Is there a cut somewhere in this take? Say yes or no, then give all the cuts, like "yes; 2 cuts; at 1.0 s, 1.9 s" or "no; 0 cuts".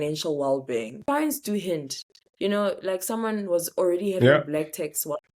yes; 1 cut; at 1.0 s